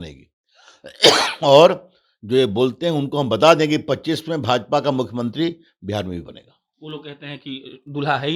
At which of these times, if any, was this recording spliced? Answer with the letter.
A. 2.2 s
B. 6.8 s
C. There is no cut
C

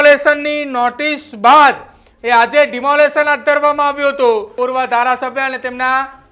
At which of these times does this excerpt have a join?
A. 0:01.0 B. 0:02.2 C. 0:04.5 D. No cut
C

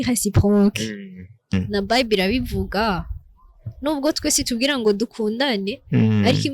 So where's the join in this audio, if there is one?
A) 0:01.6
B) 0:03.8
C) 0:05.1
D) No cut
A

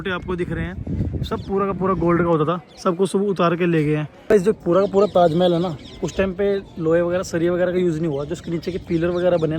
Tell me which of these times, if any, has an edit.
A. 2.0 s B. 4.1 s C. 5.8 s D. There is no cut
B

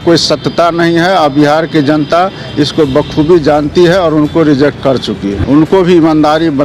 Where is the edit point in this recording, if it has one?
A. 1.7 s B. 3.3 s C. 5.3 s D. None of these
C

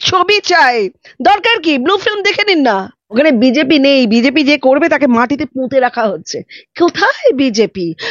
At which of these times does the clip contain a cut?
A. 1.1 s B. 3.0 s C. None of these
B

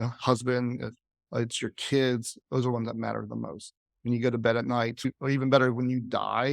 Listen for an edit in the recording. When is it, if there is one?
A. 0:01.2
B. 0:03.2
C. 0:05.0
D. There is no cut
C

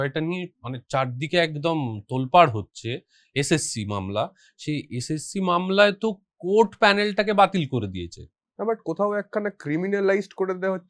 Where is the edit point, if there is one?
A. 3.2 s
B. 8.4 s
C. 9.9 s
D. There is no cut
B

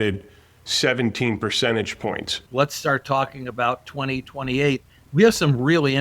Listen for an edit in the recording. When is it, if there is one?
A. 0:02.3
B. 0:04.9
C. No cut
A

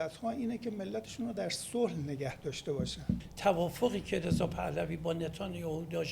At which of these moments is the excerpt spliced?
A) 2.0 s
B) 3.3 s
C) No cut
B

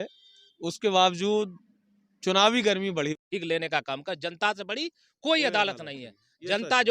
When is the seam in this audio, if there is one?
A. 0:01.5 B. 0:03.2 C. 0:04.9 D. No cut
B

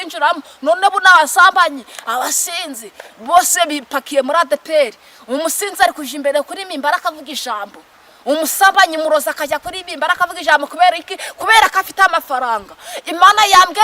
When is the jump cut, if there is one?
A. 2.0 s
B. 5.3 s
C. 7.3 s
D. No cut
D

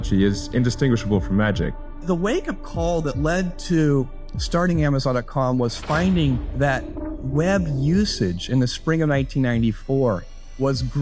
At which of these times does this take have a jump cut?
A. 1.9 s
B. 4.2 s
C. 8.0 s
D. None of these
A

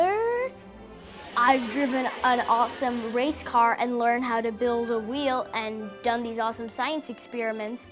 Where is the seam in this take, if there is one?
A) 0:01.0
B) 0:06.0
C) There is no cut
A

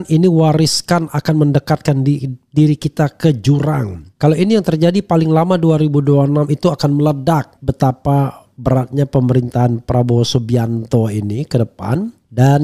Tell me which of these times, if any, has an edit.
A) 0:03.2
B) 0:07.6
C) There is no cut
B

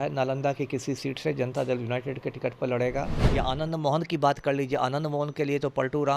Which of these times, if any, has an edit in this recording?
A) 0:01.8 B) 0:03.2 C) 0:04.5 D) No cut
B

